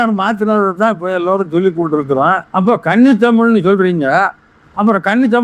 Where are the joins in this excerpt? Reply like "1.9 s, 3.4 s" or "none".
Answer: 2.6 s

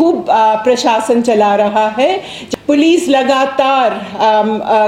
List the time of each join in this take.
2.3 s

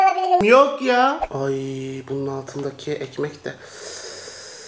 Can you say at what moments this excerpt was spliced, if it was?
1.3 s

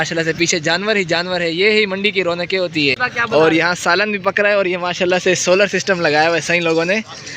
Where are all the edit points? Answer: 3.1 s

